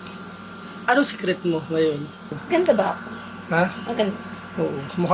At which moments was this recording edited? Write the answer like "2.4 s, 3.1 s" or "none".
2.4 s